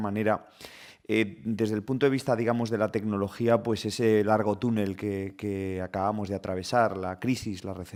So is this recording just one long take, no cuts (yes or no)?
yes